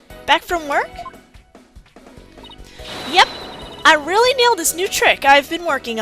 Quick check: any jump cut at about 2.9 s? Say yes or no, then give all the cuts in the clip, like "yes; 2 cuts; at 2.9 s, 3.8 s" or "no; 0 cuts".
yes; 1 cut; at 2.9 s